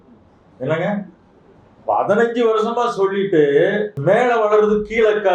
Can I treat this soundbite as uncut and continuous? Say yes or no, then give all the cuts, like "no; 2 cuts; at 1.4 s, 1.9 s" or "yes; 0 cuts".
no; 1 cut; at 3.9 s